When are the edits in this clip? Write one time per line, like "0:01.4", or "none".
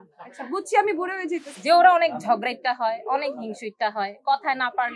0:01.5